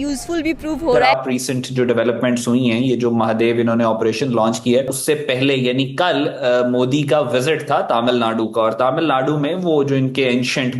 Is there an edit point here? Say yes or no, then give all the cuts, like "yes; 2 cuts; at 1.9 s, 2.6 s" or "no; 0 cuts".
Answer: yes; 2 cuts; at 1.0 s, 4.9 s